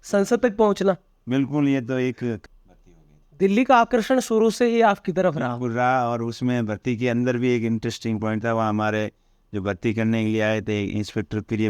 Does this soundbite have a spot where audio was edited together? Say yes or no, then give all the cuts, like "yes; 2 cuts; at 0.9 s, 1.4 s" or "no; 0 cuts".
yes; 1 cut; at 2.4 s